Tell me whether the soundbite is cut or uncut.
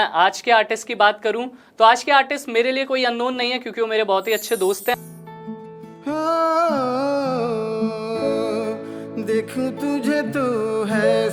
cut